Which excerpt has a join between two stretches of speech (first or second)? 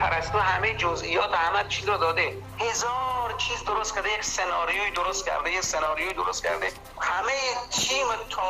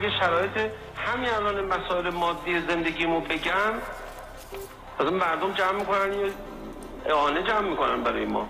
first